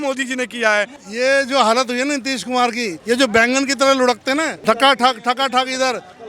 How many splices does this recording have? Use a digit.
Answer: 3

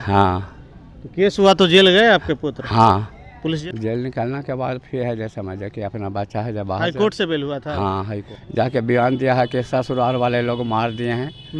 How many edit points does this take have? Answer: 2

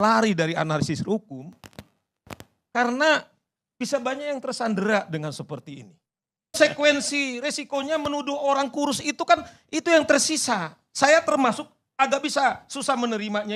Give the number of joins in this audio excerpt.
1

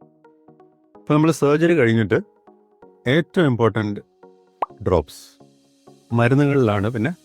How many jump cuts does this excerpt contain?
1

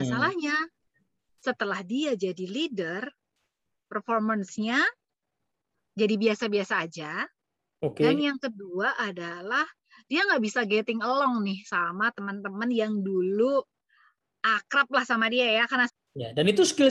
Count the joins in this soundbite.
1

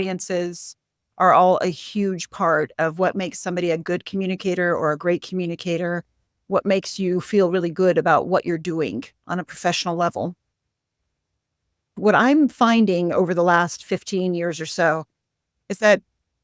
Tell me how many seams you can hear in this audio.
1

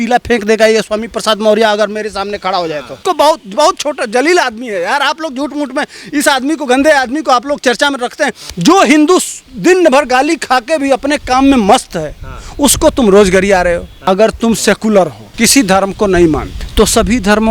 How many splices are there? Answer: 5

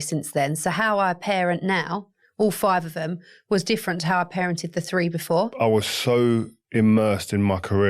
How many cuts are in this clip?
1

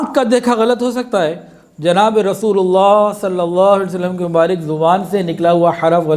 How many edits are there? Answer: 0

